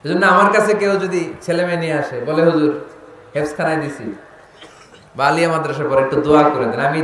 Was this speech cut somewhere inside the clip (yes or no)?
no